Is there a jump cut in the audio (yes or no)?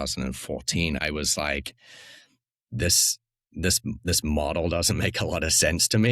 yes